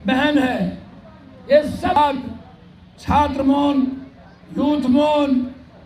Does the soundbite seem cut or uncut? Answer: cut